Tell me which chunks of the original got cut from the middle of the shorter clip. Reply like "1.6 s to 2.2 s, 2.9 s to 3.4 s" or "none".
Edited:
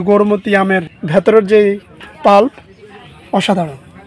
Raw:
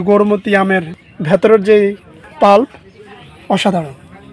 0.9 s to 1.1 s